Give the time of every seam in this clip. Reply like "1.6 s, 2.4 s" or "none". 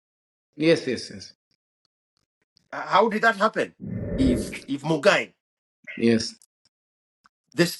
4.2 s